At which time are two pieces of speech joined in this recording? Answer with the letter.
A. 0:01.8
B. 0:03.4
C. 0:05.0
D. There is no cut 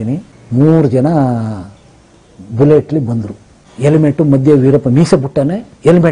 D